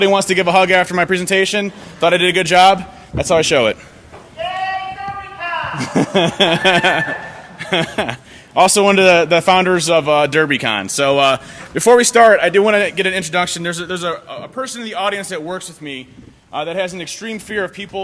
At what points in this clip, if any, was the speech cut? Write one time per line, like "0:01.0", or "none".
0:13.7